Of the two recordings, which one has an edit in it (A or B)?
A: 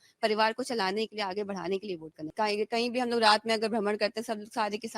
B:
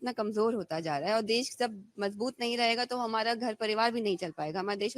A